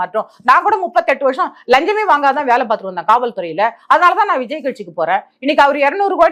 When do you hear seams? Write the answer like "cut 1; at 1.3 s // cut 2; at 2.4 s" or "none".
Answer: none

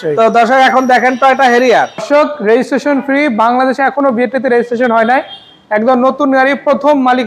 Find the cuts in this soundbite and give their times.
cut 1; at 2.0 s

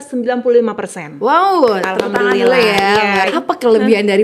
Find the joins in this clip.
cut 1; at 3.3 s

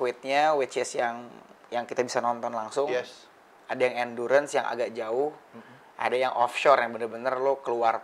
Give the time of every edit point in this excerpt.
none

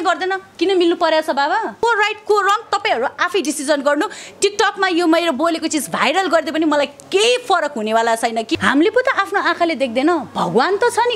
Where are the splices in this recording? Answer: cut 1; at 1.8 s // cut 2; at 8.5 s

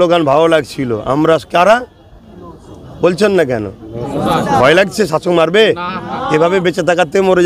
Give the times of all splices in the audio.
none

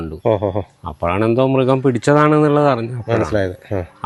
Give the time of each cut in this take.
none

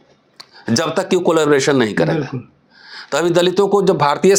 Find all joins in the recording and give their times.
none

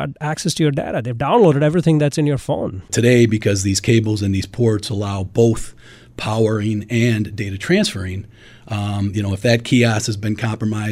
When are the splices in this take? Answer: cut 1; at 2.8 s

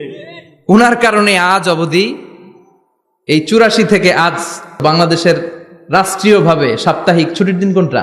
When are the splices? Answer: cut 1; at 4.8 s

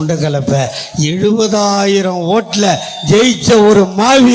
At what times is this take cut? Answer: none

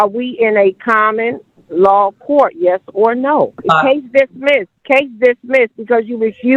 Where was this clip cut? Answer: cut 1; at 3.6 s // cut 2; at 4.7 s

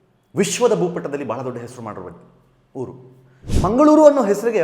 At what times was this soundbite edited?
cut 1; at 3.5 s

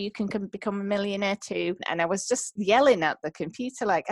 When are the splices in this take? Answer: cut 1; at 1.8 s

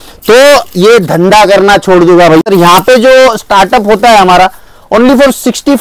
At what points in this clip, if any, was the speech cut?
cut 1; at 2.4 s

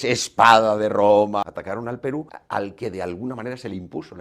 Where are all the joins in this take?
cut 1; at 1.3 s // cut 2; at 2.3 s

